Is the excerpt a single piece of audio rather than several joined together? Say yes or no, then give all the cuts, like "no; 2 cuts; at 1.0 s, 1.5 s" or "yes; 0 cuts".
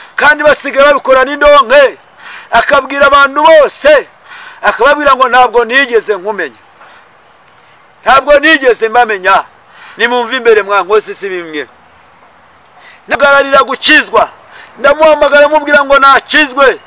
no; 1 cut; at 13.2 s